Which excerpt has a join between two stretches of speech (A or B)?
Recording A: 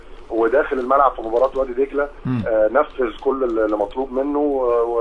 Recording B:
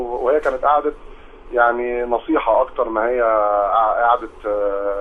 B